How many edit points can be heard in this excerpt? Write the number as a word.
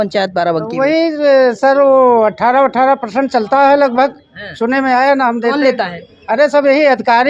zero